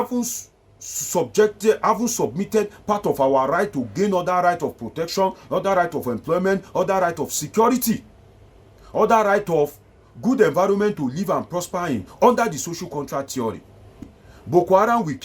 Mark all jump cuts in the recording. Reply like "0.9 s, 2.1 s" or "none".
14.2 s